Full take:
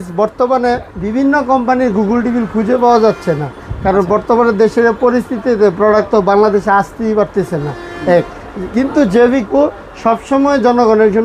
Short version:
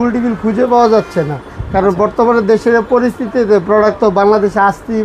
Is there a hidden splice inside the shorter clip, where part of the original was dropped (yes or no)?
no